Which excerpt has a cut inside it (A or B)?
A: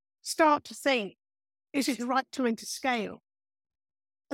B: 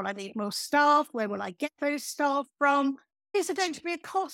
B